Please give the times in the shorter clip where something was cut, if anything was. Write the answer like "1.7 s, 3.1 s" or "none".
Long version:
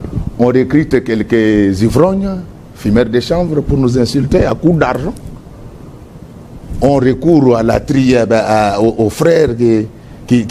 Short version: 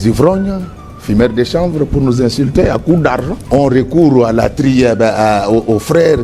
3.4 s

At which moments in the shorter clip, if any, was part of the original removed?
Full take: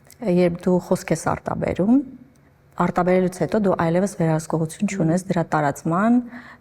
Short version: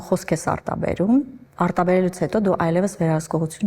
1.4 s

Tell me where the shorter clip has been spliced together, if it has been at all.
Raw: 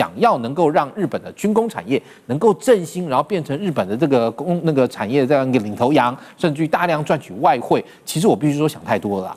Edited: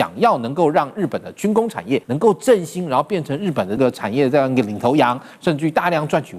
2.1 s, 3.8 s

